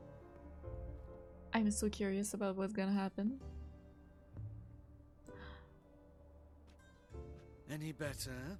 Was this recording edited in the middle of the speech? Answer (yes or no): no